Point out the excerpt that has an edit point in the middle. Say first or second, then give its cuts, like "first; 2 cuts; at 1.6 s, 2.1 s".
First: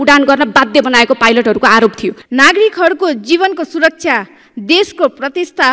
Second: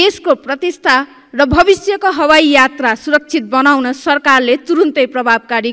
first; 1 cut; at 2.1 s